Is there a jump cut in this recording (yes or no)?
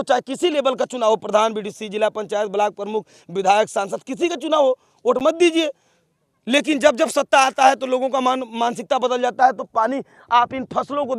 no